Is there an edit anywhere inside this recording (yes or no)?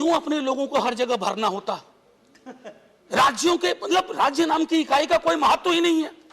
no